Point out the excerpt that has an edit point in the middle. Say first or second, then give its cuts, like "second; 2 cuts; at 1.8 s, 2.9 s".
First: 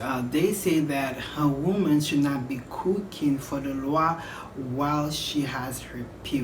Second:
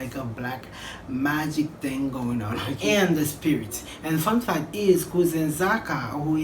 second; 1 cut; at 2.7 s